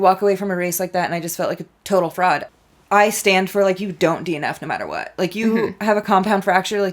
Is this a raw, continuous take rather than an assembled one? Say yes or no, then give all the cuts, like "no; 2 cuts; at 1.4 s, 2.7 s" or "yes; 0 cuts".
no; 1 cut; at 2.4 s